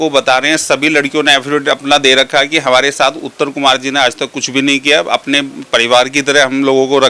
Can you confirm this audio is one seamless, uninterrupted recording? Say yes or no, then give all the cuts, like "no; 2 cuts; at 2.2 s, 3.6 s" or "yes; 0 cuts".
yes; 0 cuts